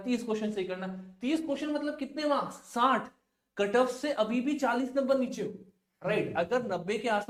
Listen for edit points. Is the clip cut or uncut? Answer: uncut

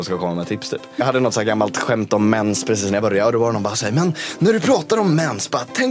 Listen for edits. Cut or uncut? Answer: cut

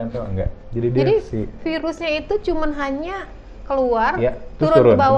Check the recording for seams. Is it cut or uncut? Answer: uncut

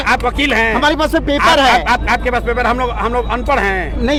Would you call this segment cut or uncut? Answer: uncut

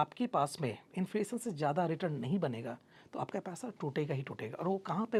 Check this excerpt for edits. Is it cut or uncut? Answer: uncut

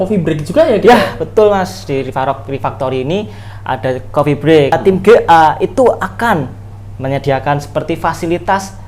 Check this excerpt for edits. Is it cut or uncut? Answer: cut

